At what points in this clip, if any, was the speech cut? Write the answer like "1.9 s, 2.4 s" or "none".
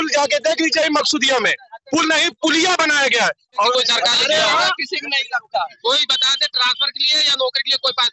3.7 s